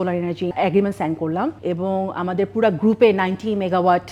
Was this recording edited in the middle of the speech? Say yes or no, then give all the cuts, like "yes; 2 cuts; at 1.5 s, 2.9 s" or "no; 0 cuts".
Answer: no; 0 cuts